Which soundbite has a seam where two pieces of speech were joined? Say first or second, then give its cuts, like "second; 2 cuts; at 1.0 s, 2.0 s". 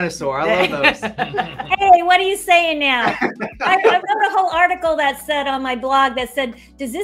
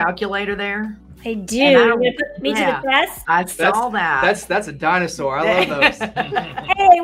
second; 2 cuts; at 1.1 s, 3.2 s